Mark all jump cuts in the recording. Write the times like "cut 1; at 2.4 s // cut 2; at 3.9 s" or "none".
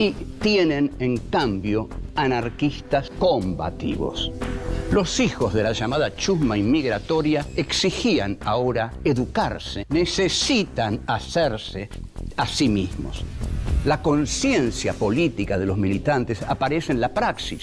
cut 1; at 10.3 s